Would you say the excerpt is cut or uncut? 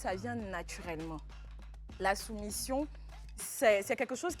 uncut